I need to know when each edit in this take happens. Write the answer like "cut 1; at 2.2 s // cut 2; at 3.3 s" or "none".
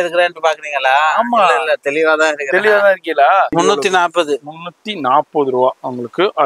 cut 1; at 3.5 s